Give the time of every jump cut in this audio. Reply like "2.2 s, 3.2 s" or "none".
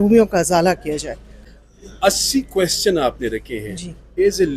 1.5 s